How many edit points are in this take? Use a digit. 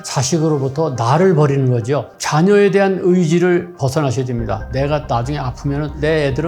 1